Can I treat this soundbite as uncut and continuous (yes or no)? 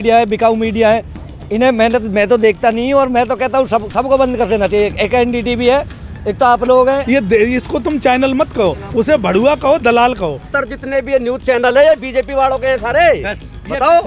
no